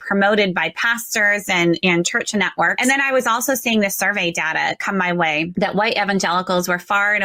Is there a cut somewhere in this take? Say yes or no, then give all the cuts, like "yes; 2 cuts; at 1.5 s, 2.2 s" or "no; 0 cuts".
yes; 2 cuts; at 2.7 s, 5.5 s